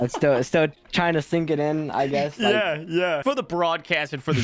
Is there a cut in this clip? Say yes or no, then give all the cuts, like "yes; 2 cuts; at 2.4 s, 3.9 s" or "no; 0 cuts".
yes; 1 cut; at 3.2 s